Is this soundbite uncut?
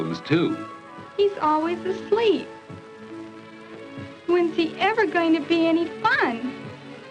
yes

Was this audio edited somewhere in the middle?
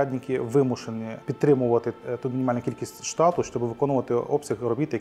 no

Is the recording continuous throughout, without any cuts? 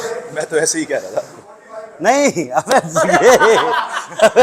yes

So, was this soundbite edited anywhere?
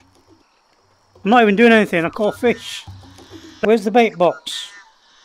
yes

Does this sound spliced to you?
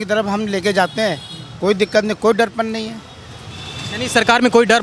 no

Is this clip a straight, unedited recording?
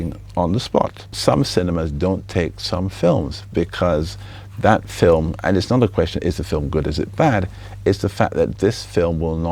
no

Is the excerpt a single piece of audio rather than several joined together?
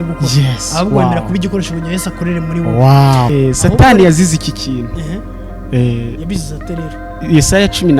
no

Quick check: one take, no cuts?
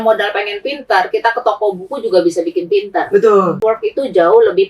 no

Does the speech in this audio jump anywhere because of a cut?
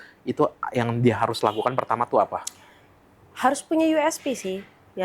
no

